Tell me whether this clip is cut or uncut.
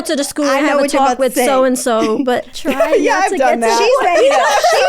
cut